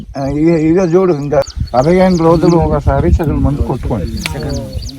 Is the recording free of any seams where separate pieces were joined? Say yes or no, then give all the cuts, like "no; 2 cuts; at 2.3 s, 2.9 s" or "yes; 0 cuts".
no; 1 cut; at 1.4 s